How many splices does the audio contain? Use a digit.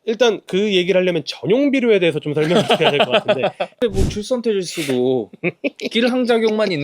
1